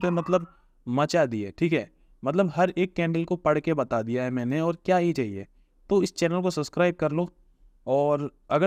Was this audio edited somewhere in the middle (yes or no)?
no